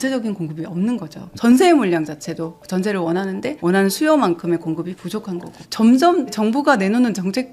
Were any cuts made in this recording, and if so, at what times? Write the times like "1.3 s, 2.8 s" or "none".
1.3 s, 3.6 s, 5.6 s, 6.3 s